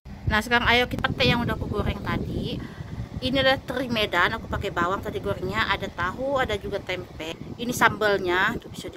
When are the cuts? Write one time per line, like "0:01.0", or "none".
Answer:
0:00.9